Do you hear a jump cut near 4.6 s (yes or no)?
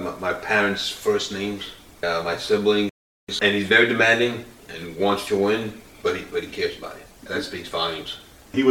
no